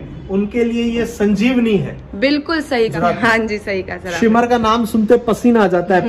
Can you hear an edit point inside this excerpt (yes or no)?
yes